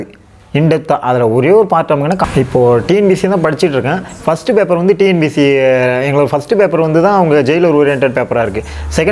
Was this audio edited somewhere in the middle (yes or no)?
yes